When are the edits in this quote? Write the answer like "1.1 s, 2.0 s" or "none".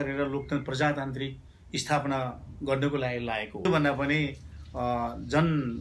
3.7 s